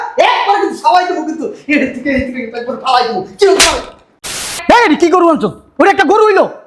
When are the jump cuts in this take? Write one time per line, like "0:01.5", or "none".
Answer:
0:04.5